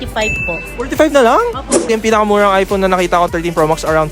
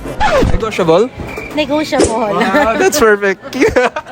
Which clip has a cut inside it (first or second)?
first